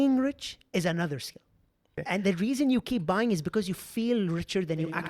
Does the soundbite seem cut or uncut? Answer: cut